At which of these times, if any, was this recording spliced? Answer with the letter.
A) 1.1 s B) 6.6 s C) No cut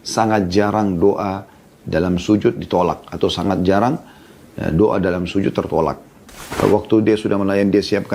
B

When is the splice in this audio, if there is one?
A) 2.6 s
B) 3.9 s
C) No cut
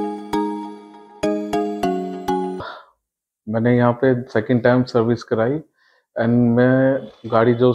A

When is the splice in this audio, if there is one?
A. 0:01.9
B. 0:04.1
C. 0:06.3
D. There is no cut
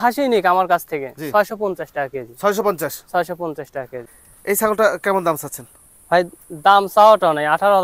B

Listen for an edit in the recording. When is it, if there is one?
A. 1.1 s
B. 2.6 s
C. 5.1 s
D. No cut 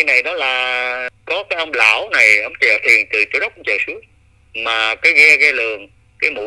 A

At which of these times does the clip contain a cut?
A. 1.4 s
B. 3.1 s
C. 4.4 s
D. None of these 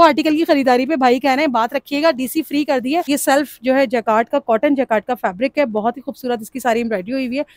B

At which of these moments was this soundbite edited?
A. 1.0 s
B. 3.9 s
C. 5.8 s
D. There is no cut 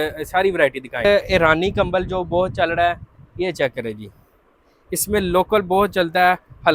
A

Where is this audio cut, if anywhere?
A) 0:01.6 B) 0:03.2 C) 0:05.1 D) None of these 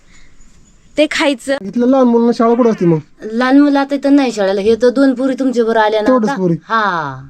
A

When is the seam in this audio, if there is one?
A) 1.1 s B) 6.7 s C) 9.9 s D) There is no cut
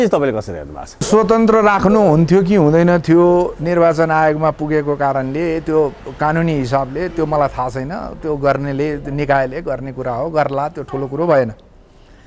A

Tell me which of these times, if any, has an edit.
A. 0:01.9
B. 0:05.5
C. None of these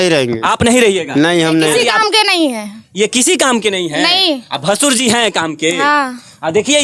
A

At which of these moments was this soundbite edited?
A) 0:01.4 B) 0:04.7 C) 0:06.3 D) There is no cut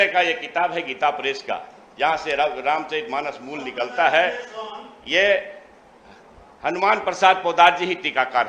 D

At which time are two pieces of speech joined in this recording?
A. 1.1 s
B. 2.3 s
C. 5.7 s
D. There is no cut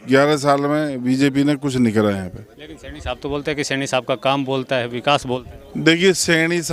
D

